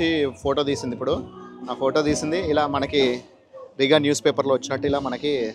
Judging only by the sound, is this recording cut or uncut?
uncut